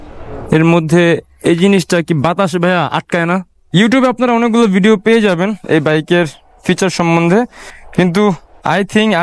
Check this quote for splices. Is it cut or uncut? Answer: cut